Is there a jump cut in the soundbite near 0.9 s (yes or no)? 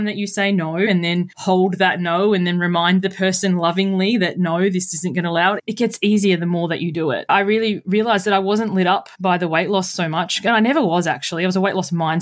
yes